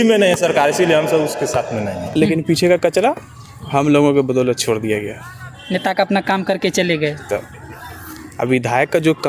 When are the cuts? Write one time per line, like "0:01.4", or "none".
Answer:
0:02.1